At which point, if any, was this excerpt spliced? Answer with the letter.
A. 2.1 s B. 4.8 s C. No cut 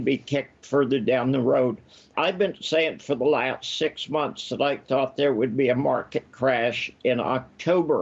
A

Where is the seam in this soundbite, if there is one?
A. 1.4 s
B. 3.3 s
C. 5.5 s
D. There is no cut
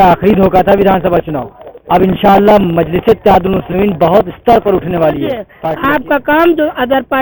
C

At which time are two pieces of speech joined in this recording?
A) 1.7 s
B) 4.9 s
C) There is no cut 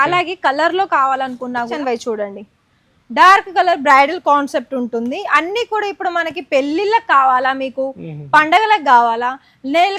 A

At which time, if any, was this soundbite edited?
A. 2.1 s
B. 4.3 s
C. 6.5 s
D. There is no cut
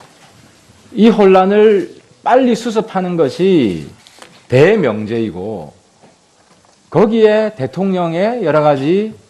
D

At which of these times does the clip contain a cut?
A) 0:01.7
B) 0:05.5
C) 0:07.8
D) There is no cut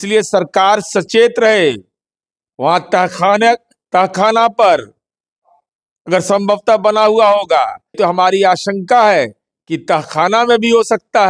C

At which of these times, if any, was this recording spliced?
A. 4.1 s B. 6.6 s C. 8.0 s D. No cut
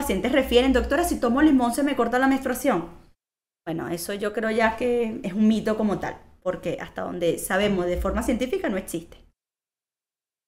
D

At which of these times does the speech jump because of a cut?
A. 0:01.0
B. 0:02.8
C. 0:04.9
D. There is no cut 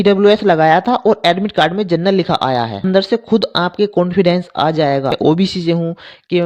B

